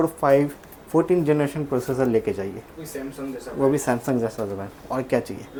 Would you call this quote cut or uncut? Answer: uncut